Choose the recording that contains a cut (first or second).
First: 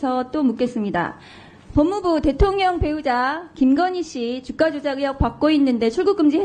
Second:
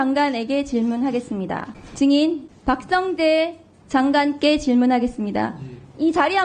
second